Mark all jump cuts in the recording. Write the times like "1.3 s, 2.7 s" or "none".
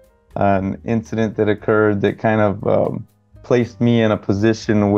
none